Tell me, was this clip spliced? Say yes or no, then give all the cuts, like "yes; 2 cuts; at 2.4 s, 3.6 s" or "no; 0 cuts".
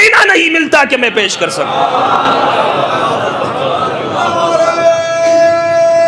no; 0 cuts